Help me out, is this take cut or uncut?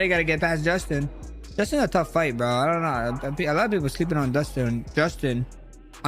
uncut